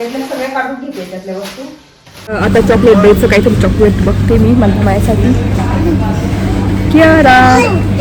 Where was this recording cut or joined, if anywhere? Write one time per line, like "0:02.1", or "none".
0:02.3